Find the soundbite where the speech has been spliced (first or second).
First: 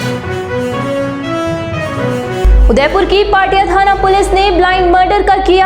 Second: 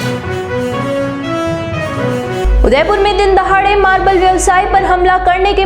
first